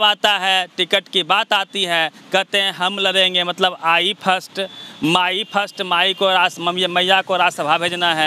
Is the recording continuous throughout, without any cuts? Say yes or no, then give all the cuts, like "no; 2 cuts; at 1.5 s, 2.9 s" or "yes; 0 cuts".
yes; 0 cuts